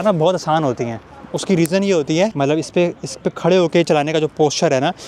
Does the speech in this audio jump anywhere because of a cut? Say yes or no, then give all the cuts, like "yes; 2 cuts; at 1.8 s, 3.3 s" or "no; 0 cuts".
no; 0 cuts